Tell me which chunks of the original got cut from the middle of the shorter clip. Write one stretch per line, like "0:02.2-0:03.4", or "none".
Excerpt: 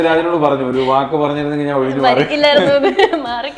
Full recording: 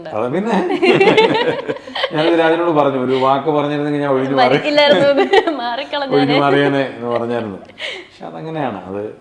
none